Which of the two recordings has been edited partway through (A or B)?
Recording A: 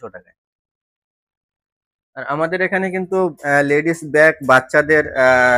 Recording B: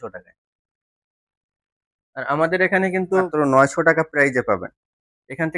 B